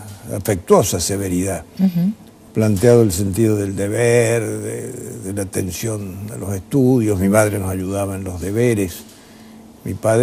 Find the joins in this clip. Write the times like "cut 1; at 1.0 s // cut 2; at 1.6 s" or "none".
cut 1; at 7.7 s